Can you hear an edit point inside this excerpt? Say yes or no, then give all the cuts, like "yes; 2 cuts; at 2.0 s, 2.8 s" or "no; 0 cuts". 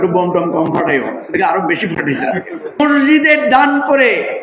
yes; 1 cut; at 2.8 s